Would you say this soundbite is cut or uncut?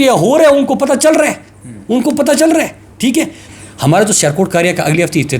cut